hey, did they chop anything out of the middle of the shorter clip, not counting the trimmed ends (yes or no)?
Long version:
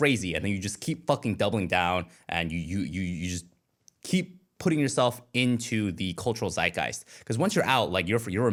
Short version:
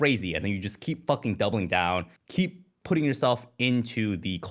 yes